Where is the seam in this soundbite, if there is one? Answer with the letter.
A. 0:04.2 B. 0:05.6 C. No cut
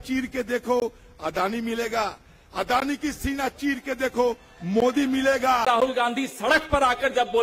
B